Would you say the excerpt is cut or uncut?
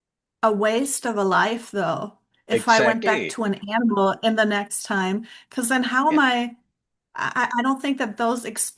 uncut